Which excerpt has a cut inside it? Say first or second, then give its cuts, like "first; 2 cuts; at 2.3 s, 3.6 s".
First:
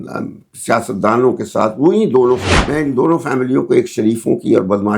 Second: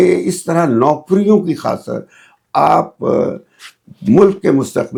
first; 1 cut; at 2.6 s